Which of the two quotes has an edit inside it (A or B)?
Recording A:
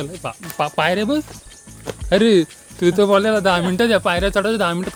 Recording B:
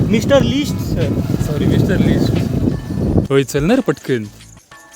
B